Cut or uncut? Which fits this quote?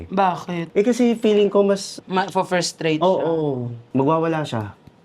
cut